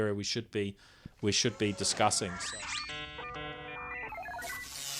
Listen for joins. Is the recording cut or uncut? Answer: cut